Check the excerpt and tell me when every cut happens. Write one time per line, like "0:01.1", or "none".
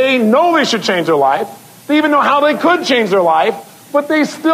none

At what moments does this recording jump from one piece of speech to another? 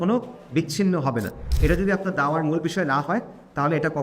0:01.4

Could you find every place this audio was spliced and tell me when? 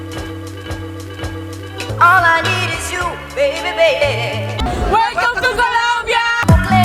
none

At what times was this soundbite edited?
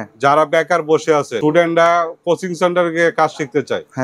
0:01.3

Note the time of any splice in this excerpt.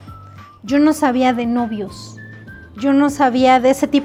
none

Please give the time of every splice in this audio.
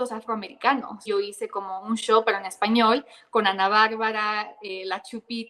0:01.0

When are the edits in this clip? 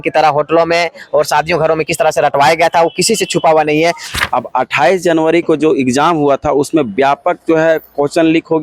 0:04.0

